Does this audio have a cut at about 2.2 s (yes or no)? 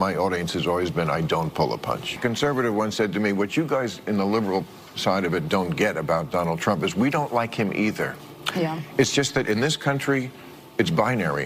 yes